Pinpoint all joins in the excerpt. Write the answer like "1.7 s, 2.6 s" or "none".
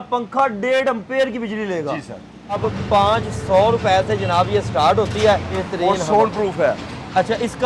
2.6 s, 5.6 s